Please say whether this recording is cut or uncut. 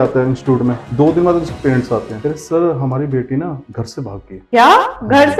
cut